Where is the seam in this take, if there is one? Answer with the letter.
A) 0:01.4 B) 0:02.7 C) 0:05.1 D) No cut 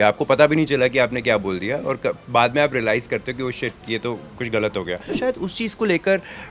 C